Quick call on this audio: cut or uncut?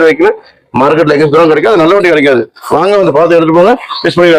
uncut